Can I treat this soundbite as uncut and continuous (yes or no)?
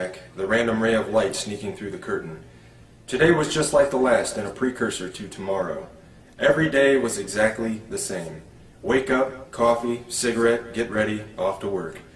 yes